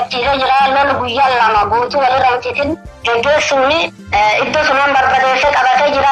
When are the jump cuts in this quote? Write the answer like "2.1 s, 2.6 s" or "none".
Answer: 4.0 s